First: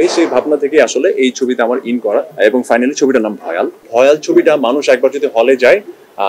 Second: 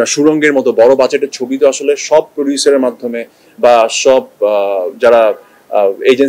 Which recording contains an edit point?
first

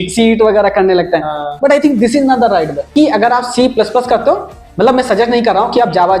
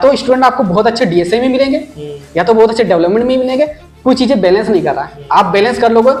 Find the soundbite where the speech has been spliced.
first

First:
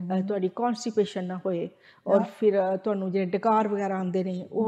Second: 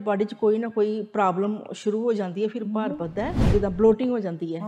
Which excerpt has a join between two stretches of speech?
second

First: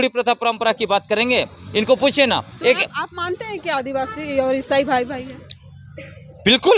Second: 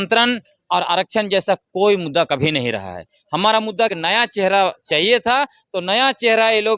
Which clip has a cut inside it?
second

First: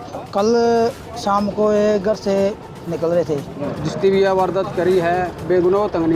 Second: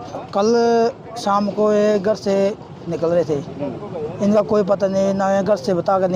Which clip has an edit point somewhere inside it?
first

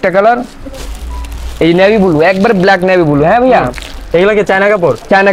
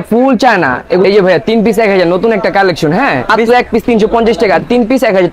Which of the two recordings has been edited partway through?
second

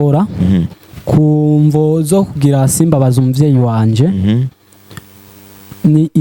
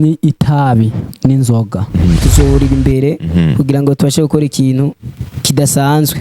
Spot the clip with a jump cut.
second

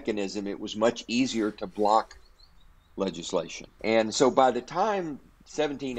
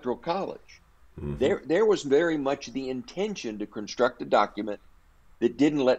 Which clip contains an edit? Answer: first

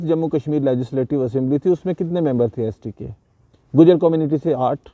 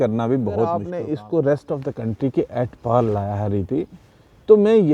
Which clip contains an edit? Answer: second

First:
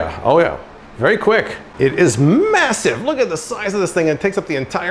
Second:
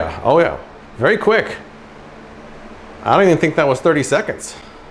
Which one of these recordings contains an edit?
first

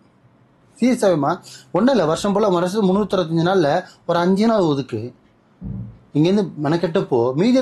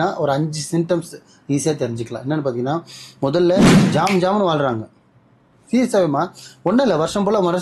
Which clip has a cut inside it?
second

